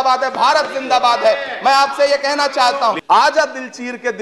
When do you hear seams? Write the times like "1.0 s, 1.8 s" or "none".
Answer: 3.0 s